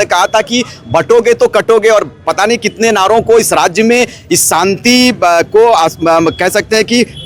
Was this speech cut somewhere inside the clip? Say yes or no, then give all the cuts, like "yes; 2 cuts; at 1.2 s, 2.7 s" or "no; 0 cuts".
no; 0 cuts